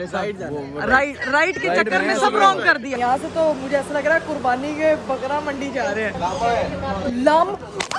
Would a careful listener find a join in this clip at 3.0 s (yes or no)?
yes